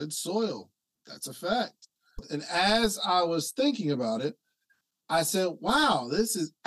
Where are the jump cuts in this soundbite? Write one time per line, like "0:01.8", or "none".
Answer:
0:02.3